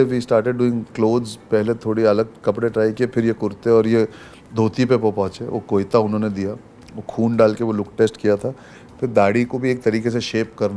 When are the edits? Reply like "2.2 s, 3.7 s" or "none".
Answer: none